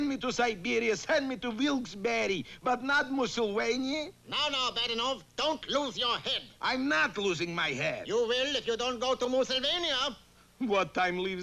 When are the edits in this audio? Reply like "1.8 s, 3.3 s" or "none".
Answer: none